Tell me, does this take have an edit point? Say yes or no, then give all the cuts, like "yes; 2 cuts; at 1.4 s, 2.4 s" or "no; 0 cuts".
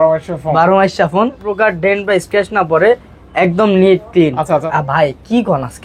yes; 2 cuts; at 1.4 s, 4.7 s